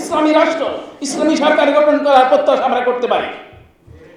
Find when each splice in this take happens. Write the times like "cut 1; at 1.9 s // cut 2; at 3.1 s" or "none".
none